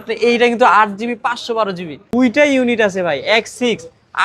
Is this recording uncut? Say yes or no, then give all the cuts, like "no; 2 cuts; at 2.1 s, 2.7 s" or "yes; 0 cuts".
no; 1 cut; at 2.0 s